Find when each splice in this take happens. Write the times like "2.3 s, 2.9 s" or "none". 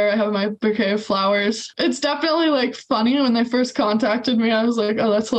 1.7 s

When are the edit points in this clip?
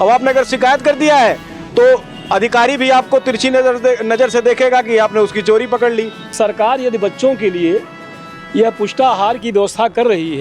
6.3 s

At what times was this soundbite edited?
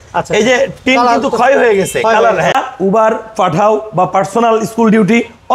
2.5 s

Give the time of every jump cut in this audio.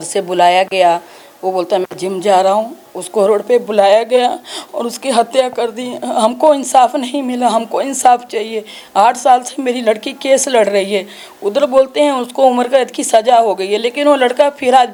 none

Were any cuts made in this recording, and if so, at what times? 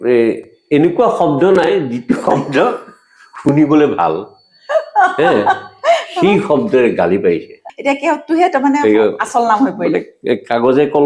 7.5 s

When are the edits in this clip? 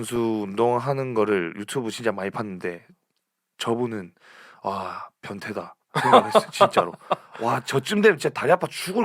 none

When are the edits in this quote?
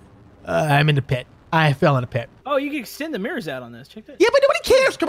2.3 s

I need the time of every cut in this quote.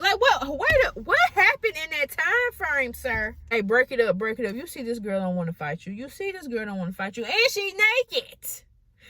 3.5 s

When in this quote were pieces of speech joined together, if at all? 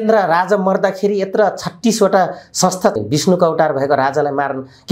3.0 s

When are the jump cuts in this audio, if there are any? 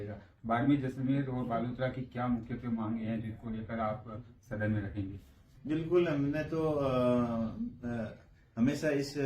5.5 s

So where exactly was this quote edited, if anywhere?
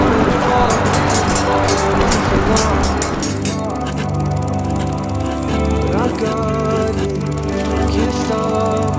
none

